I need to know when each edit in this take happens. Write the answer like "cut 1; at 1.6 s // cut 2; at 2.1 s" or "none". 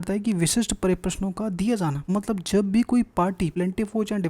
cut 1; at 2.0 s // cut 2; at 3.5 s